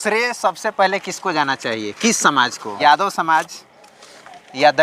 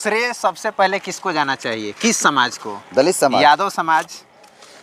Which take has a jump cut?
first; 1 cut; at 2.8 s

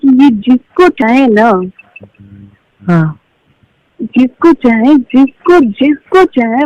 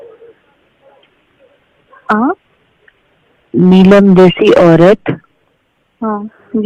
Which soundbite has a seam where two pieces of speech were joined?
first; 1 cut; at 1.0 s

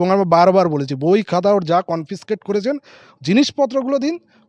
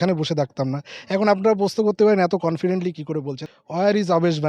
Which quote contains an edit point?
second; 1 cut; at 3.3 s

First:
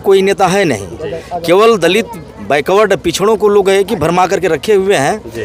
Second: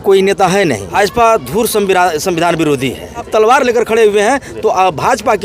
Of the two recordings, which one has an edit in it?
second; 2 cuts; at 0.8 s, 3.3 s

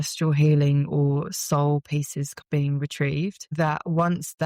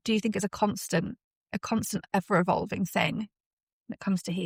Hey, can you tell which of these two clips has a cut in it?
first; 2 cuts; at 2.3 s, 3.5 s

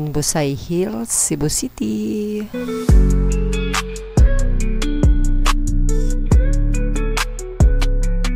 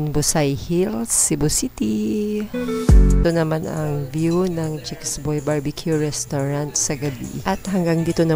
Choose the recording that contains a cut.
second; 1 cut; at 3.2 s

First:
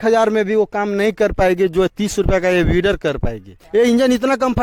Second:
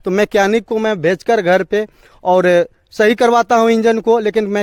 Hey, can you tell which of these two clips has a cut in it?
first; 1 cut; at 3.6 s

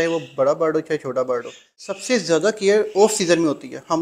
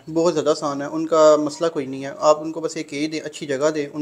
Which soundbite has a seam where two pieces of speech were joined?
first; 1 cut; at 1.8 s

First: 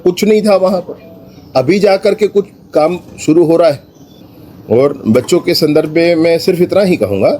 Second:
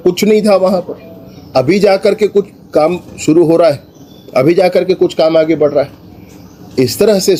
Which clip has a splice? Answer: first; 1 cut; at 4.2 s

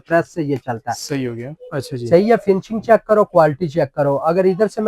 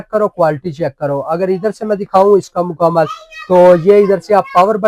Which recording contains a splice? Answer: first; 1 cut; at 1.4 s

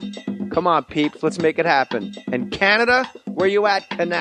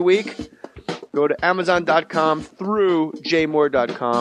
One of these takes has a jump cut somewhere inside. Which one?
second; 1 cut; at 1.3 s

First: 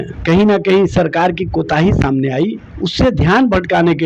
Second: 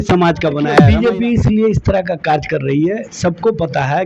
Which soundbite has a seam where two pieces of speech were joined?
second; 2 cuts; at 0.8 s, 3.1 s

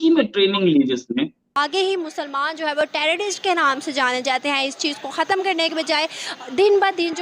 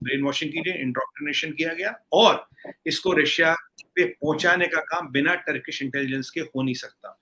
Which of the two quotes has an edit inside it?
first; 1 cut; at 1.5 s

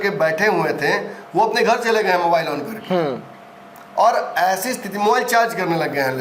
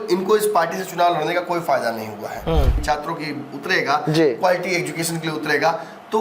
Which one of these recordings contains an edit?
second; 1 cut; at 2.7 s

